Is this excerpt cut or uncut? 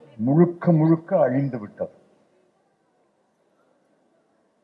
uncut